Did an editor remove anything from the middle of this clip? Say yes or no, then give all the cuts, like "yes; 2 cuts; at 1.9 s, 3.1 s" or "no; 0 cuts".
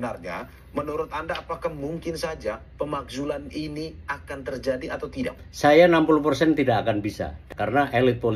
yes; 1 cut; at 7.4 s